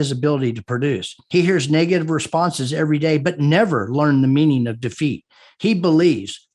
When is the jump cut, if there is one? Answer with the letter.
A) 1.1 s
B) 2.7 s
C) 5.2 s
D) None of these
A